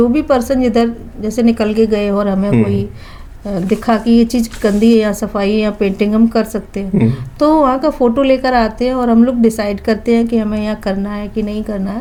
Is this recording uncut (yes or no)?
yes